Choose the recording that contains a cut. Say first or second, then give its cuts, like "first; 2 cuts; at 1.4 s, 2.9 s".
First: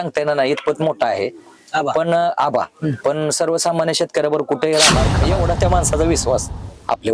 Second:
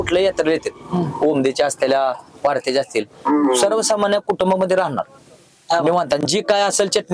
first; 1 cut; at 5.2 s